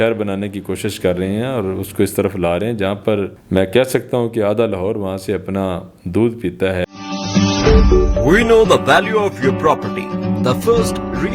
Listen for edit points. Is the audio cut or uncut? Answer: cut